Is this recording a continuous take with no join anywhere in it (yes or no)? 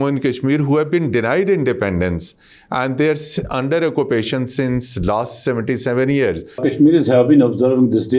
no